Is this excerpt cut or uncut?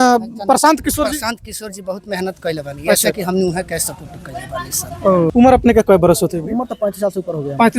cut